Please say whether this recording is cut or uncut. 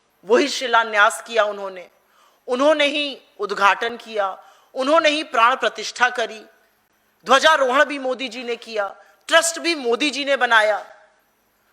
uncut